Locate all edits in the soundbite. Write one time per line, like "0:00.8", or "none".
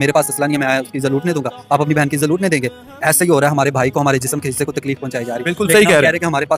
none